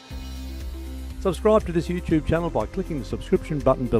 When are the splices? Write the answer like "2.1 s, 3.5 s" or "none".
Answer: 1.2 s